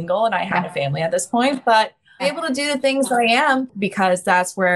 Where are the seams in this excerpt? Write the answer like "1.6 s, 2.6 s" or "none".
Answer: 2.2 s, 3.7 s